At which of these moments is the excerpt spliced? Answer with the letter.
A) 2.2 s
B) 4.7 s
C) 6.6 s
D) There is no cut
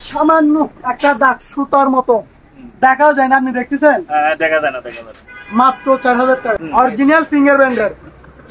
C